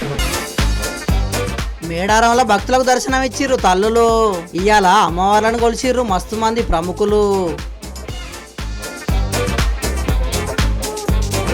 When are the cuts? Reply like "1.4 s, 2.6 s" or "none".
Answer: none